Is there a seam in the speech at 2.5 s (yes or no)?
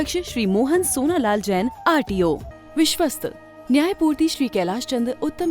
yes